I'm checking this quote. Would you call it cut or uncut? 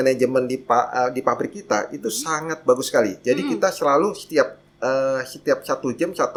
uncut